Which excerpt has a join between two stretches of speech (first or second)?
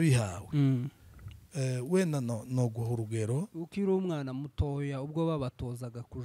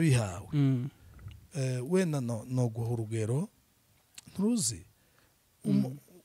first